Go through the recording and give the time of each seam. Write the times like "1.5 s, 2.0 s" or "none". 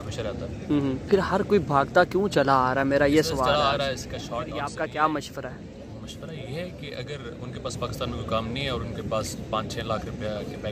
4.7 s